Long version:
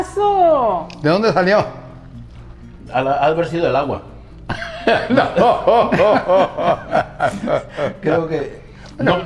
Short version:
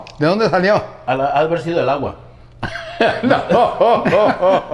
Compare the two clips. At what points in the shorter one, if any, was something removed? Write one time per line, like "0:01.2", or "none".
0:00.9